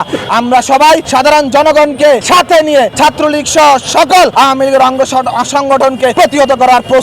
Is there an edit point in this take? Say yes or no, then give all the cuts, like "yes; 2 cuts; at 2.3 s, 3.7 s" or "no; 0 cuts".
yes; 5 cuts; at 1.1 s, 2.2 s, 2.9 s, 4.3 s, 6.1 s